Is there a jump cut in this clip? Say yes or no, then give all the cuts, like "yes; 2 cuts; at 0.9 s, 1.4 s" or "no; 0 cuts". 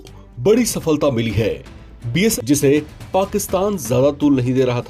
yes; 1 cut; at 2.3 s